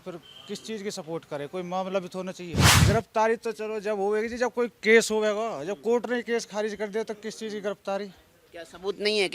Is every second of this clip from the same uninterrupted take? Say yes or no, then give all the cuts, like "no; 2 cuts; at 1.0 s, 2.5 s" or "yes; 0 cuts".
no; 1 cut; at 2.6 s